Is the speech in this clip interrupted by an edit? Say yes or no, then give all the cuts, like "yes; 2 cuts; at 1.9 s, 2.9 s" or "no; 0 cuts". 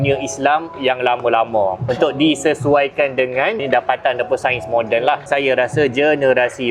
yes; 3 cuts; at 1.8 s, 3.6 s, 5.3 s